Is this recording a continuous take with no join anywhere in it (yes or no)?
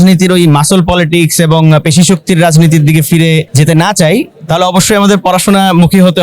no